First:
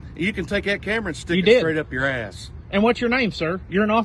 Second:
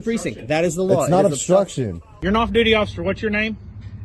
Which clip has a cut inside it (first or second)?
second